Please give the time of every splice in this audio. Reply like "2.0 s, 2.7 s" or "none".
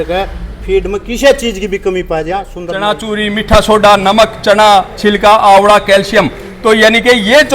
2.9 s